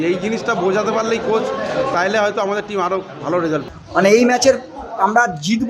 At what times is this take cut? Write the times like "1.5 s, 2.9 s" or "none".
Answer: 3.8 s